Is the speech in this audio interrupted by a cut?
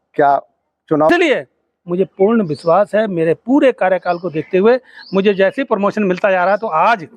yes; 1 cut; at 1.1 s

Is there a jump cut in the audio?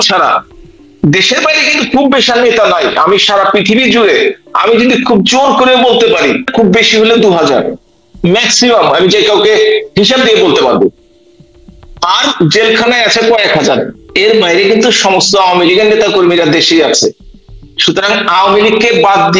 yes; 1 cut; at 6.5 s

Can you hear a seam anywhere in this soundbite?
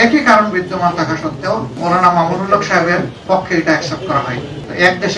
no; 0 cuts

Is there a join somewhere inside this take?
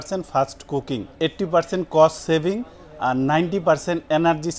yes; 1 cut; at 1.1 s

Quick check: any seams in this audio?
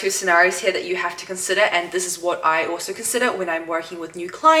no; 0 cuts

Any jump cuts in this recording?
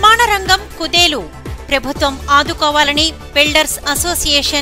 no; 0 cuts

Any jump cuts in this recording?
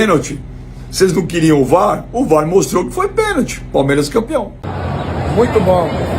no; 0 cuts

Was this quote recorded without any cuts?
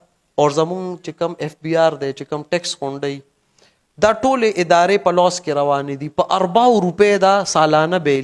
yes; 0 cuts

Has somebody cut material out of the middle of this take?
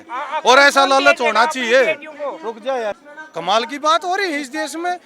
yes; 1 cut; at 3.1 s

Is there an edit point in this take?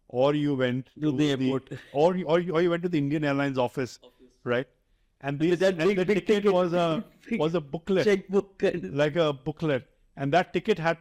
no; 0 cuts

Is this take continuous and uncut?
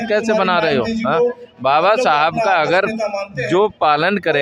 yes; 0 cuts

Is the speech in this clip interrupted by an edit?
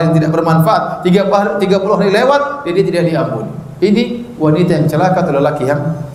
no; 0 cuts

